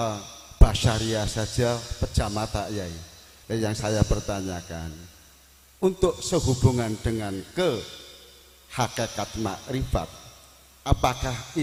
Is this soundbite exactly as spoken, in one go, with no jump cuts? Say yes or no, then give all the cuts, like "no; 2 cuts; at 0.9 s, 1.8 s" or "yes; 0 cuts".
yes; 0 cuts